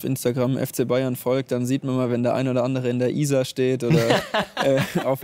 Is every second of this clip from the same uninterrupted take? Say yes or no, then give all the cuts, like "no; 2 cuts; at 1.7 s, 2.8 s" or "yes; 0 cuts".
yes; 0 cuts